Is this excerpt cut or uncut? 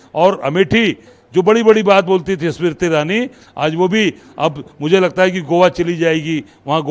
cut